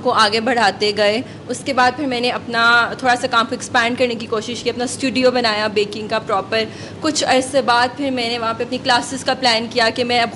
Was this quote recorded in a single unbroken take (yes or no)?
yes